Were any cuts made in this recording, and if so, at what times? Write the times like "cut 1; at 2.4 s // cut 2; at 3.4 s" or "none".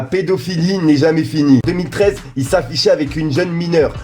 cut 1; at 1.6 s